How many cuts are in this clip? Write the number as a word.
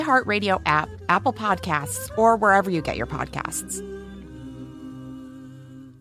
one